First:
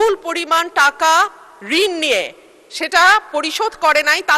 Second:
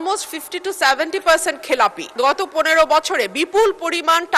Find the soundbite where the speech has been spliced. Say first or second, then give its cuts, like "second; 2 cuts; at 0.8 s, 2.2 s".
second; 1 cut; at 2.1 s